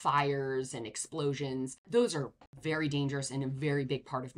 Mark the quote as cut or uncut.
cut